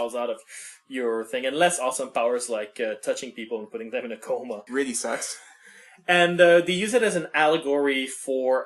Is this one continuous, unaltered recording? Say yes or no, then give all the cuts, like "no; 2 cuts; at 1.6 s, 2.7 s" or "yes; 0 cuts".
yes; 0 cuts